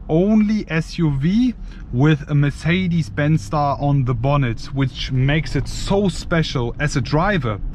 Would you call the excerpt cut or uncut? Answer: uncut